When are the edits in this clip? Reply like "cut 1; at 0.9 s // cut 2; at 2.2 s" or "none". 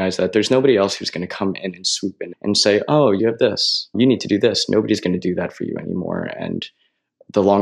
none